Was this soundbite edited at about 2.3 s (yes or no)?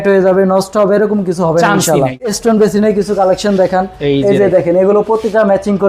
yes